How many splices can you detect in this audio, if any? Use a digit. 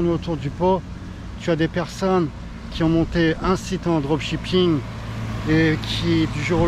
0